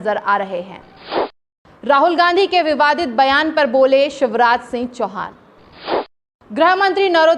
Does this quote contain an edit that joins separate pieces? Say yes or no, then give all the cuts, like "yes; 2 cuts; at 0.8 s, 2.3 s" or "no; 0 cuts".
yes; 2 cuts; at 1.2 s, 5.9 s